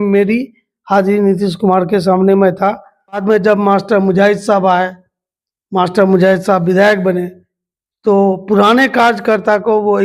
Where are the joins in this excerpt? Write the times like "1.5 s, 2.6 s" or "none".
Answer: 3.2 s